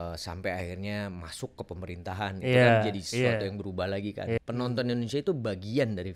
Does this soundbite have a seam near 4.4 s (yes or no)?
yes